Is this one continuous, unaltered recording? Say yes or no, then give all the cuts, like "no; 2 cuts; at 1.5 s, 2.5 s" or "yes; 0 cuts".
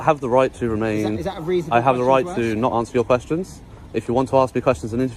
yes; 0 cuts